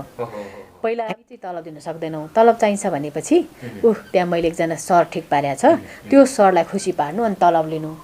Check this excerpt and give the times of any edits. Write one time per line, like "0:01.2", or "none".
0:01.7